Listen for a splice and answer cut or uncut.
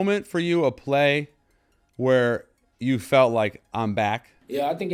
uncut